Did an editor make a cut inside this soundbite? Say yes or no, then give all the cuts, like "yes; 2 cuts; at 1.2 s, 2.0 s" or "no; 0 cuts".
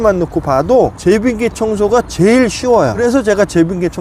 yes; 2 cuts; at 1.0 s, 3.0 s